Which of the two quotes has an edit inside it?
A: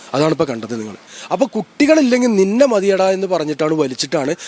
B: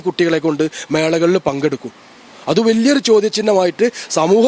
A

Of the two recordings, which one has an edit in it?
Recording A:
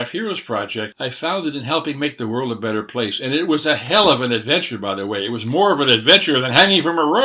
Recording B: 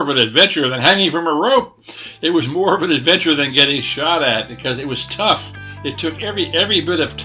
A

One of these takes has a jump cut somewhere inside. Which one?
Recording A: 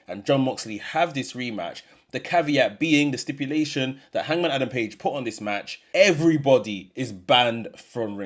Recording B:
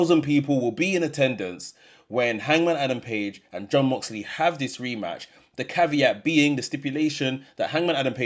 A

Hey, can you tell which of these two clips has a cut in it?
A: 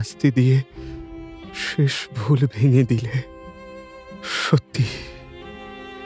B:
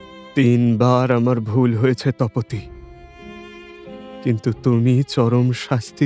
A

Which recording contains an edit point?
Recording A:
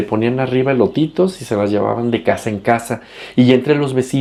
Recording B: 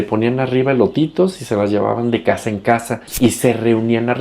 B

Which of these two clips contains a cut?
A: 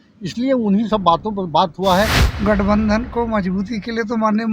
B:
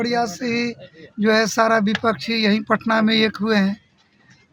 A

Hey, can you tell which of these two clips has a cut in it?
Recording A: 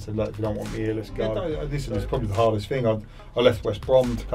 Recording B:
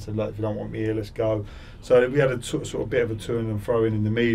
A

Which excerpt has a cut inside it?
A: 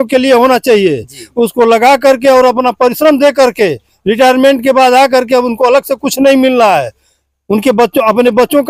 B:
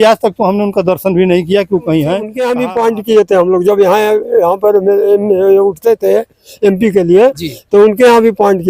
B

